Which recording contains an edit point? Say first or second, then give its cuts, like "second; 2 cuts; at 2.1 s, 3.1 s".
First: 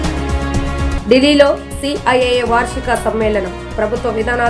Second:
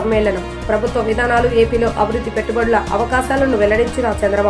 first; 1 cut; at 0.9 s